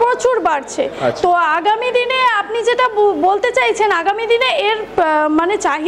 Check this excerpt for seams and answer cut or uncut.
uncut